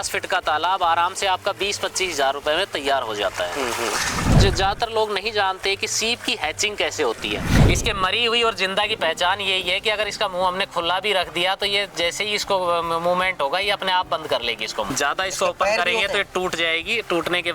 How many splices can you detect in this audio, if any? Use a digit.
3